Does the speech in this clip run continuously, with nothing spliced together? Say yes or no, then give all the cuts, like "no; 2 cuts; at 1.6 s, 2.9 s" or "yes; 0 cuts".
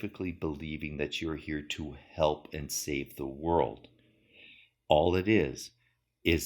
no; 1 cut; at 4.7 s